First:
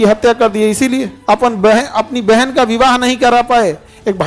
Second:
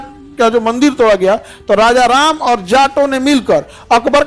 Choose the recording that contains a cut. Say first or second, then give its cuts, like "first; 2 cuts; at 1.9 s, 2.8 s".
first; 1 cut; at 1.1 s